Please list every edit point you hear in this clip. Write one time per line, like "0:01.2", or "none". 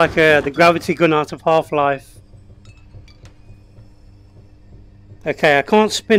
none